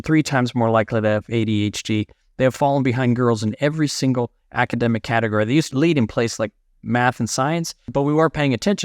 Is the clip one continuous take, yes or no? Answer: no